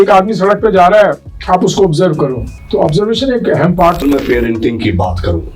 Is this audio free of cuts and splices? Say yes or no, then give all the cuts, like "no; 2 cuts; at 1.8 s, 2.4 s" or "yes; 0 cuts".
no; 3 cuts; at 1.3 s, 2.5 s, 4.0 s